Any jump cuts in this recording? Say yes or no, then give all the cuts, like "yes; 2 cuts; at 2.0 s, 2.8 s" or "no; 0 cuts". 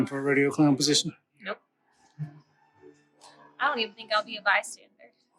no; 0 cuts